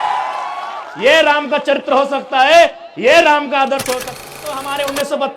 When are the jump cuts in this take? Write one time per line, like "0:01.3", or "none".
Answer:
0:04.1